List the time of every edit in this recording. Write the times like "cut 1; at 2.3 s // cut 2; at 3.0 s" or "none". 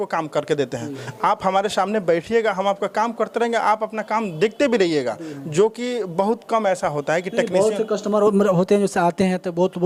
none